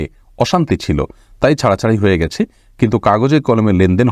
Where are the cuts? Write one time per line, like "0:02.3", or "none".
none